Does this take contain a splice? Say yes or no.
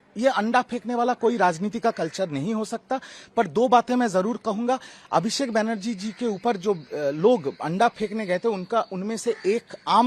no